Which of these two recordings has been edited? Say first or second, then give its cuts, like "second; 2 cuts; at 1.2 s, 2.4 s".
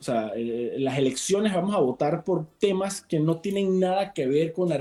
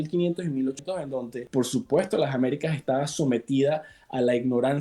second; 1 cut; at 1.1 s